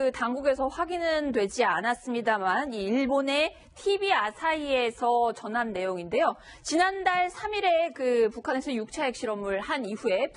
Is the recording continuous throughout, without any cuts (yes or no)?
yes